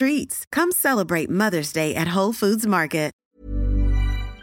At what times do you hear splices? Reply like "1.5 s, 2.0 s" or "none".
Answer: 3.2 s